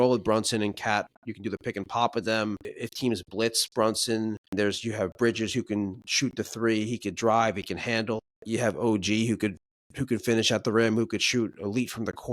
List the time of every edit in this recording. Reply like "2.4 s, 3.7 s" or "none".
2.8 s, 4.5 s, 8.3 s